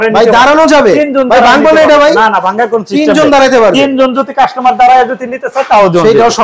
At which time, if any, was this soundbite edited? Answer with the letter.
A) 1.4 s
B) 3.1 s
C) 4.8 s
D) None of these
D